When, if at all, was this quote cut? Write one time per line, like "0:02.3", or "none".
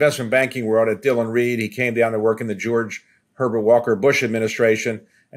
none